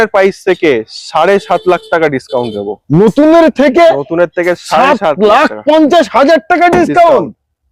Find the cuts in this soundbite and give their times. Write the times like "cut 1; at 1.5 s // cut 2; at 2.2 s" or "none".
none